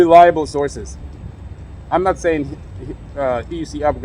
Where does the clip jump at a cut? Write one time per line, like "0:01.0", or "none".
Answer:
none